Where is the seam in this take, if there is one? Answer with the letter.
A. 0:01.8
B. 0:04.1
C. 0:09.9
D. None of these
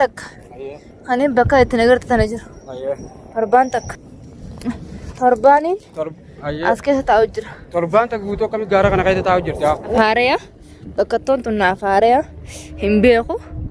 C